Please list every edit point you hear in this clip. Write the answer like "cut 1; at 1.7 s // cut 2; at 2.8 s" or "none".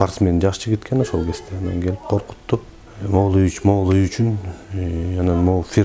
none